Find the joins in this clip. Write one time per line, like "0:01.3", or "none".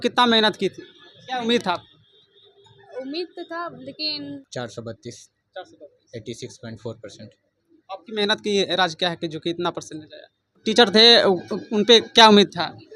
0:04.4
0:10.6